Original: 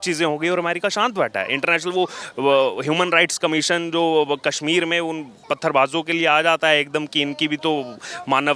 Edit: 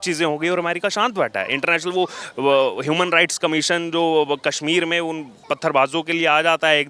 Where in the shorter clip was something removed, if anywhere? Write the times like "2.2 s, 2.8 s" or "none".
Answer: none